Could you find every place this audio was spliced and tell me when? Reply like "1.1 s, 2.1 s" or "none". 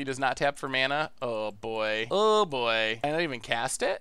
2.0 s, 3.0 s